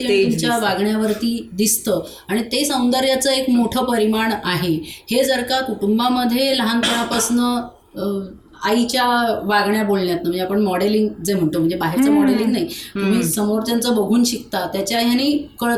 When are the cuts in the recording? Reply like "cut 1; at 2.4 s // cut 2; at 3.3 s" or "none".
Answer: none

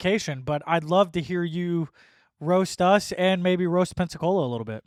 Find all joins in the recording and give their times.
none

